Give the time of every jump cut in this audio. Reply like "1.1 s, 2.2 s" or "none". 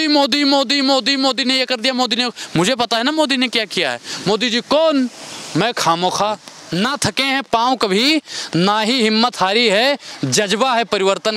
6.5 s